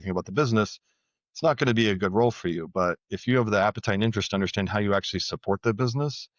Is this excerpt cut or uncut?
uncut